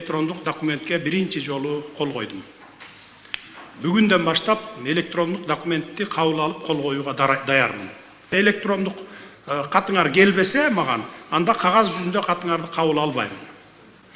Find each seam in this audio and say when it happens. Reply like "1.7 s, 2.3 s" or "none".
8.3 s

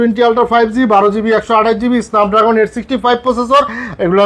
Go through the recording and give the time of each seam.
none

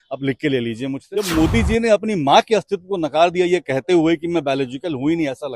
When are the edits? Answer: 1.1 s

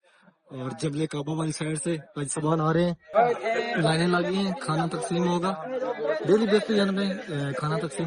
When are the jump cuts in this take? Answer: 3.1 s

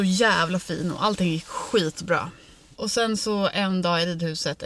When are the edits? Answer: none

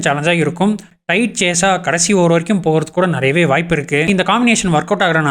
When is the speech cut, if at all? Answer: 1.0 s, 4.1 s

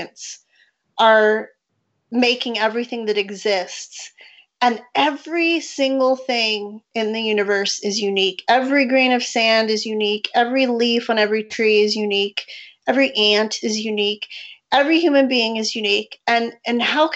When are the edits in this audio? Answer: none

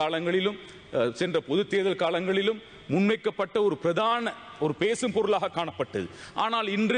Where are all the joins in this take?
none

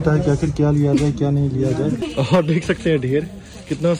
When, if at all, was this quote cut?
2.0 s

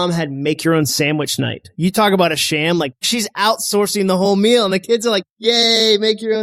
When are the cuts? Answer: 3.1 s

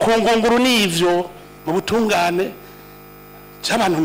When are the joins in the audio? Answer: 1.5 s

